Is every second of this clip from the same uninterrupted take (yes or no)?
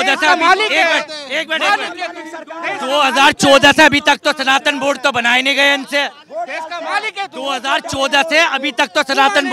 yes